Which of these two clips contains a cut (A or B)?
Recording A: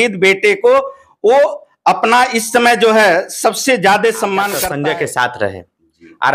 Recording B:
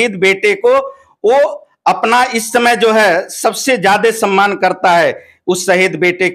A